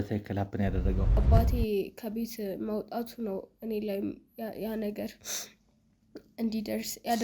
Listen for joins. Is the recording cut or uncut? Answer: cut